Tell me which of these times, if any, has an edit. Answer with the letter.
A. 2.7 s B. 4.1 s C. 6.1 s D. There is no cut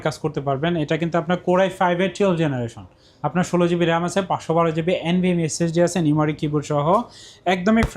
D